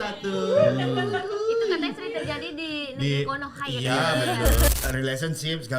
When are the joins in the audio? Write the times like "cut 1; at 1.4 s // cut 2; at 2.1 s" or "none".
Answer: cut 1; at 4.7 s